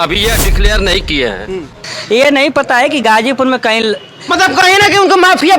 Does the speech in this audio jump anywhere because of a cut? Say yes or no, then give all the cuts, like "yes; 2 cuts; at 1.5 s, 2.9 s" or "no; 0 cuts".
yes; 1 cut; at 1.9 s